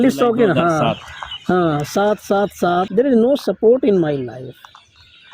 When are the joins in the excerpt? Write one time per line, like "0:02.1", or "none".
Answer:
0:02.9

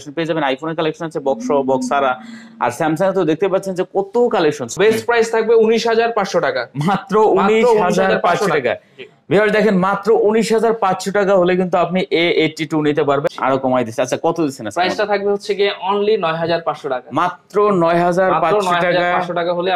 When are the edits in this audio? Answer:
0:04.7
0:13.3

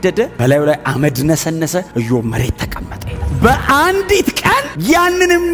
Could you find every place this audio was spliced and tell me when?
0:03.2

